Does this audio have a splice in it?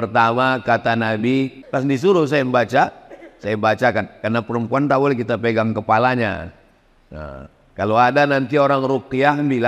yes; 1 cut; at 1.6 s

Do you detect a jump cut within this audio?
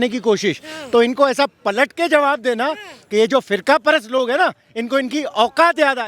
no; 0 cuts

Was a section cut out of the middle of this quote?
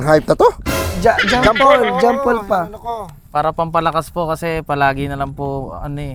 no; 0 cuts

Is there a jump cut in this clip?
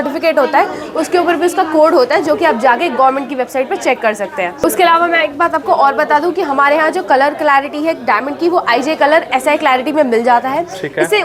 no; 0 cuts

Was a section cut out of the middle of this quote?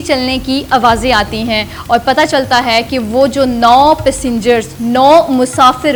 no; 0 cuts

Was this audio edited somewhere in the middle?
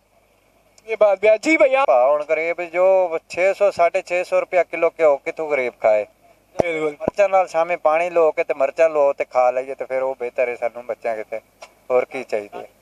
yes; 1 cut; at 1.8 s

